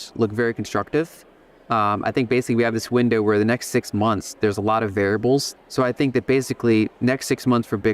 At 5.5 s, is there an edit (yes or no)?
yes